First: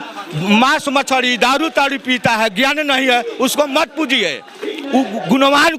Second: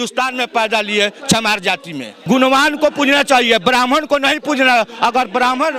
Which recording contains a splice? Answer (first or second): second